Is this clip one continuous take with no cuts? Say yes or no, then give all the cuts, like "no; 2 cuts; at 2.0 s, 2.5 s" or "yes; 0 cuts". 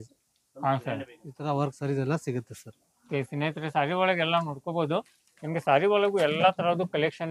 yes; 0 cuts